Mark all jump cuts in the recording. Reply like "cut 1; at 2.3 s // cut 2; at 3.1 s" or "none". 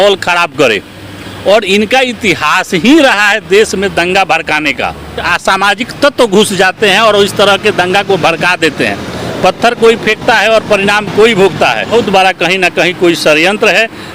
cut 1; at 5.3 s // cut 2; at 11.9 s